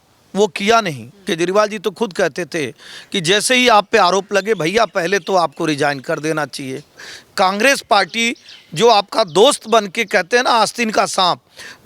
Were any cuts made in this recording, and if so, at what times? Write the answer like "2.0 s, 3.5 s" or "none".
1.2 s, 7.1 s